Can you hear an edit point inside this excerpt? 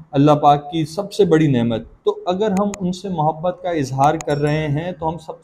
no; 0 cuts

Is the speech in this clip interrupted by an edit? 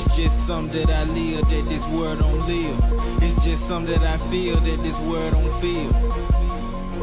no; 0 cuts

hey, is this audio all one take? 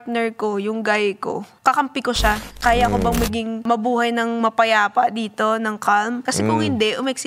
no; 4 cuts; at 1.5 s, 2.5 s, 3.6 s, 6.2 s

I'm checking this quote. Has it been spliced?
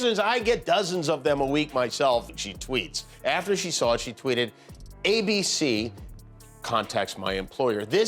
yes; 1 cut; at 2.2 s

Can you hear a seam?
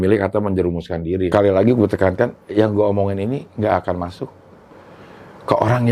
yes; 1 cut; at 1.3 s

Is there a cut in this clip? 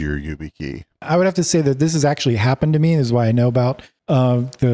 yes; 1 cut; at 1.0 s

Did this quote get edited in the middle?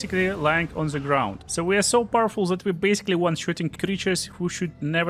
yes; 1 cut; at 1.4 s

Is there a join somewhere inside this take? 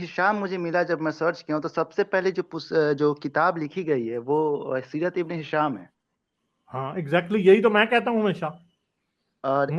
no; 0 cuts

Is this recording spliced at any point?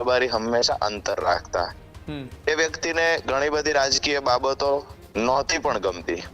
no; 0 cuts

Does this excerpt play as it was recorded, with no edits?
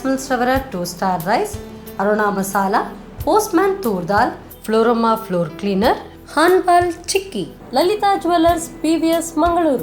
yes; 0 cuts

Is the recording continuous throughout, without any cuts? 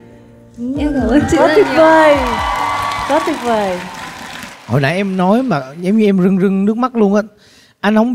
yes; 0 cuts

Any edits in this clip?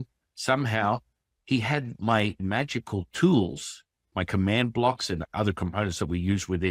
yes; 2 cuts; at 2.4 s, 5.2 s

